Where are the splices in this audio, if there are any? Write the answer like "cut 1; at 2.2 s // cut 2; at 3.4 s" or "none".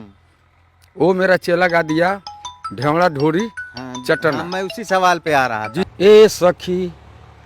cut 1; at 5.8 s